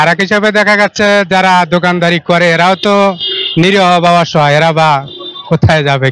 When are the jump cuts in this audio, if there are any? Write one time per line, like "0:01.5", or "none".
none